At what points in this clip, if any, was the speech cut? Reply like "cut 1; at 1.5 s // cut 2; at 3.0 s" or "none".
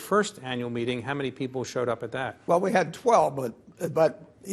none